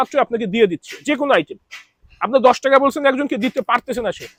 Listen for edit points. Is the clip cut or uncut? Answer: uncut